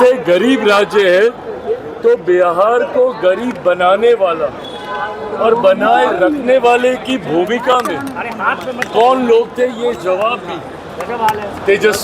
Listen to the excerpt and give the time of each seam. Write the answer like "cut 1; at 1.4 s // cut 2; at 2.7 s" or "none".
none